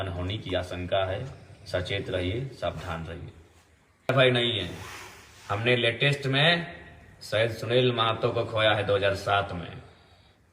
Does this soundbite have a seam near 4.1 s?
yes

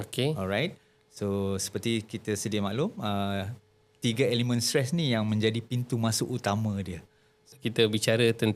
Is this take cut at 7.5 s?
yes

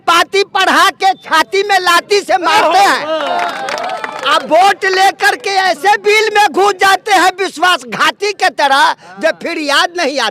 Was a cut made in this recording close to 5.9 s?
no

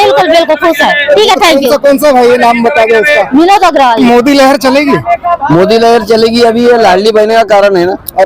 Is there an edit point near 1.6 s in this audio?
no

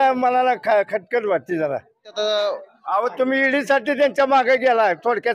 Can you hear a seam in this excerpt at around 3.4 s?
no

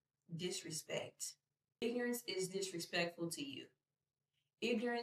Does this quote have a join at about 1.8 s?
yes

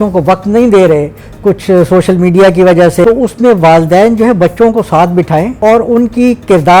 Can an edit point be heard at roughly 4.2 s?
no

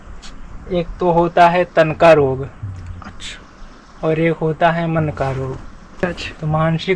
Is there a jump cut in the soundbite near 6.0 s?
yes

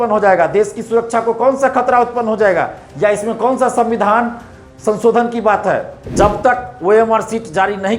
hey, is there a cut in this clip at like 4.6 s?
no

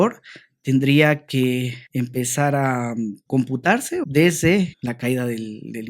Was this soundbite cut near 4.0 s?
yes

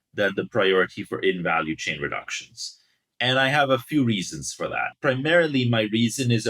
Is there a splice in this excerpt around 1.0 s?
no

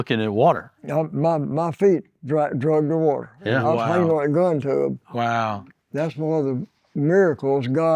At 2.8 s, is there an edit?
no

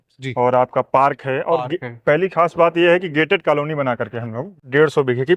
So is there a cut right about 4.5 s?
yes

